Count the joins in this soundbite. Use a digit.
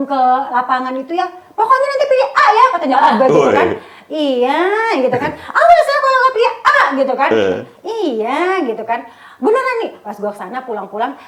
0